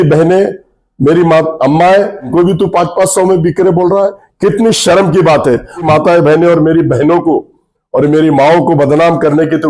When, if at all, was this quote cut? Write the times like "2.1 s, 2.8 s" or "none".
2.3 s, 5.8 s